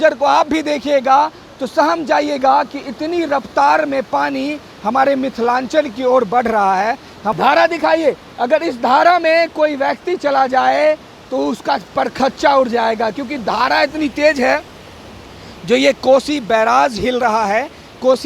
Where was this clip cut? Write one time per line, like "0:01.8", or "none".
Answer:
0:07.2